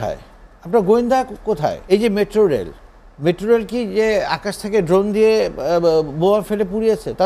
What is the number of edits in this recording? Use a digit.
1